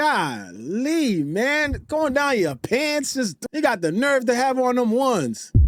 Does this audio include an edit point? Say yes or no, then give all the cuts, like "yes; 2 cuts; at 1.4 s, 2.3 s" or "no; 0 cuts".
no; 0 cuts